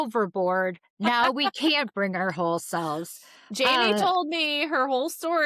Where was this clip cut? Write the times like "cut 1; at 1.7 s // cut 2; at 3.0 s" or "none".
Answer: none